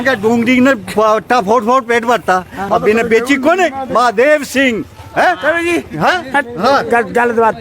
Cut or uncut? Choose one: cut